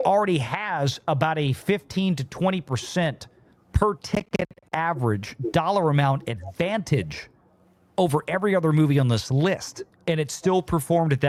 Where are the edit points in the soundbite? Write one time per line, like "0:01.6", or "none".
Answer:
none

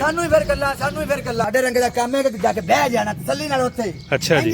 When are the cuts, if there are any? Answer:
0:01.4

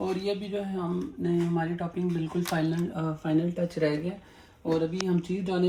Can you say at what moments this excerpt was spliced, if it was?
none

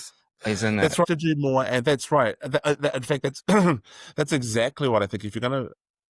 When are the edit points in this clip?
0:01.0

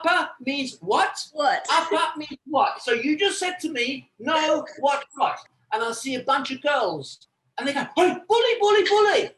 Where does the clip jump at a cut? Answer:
0:05.4

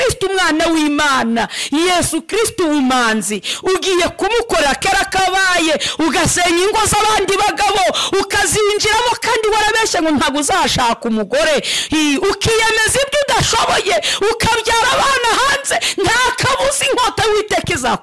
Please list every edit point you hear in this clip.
none

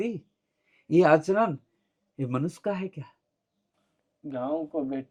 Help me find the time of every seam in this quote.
none

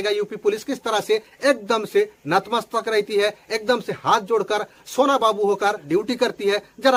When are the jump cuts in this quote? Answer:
none

